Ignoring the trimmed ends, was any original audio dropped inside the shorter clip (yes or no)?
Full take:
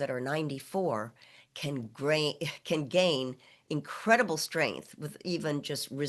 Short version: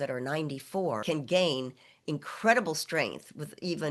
yes